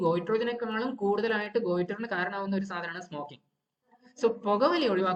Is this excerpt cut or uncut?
uncut